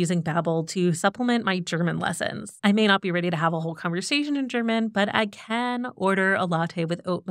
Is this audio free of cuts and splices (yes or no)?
no